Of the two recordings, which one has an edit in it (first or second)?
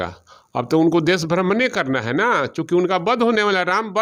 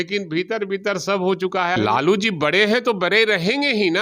second